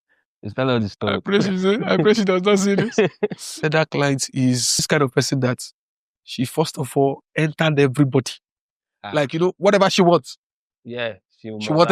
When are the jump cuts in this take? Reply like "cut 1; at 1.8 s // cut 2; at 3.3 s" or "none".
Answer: cut 1; at 3.5 s // cut 2; at 4.8 s